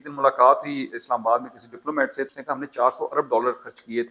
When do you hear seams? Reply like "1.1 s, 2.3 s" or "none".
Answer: 2.3 s